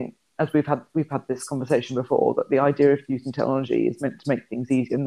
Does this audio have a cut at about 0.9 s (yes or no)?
no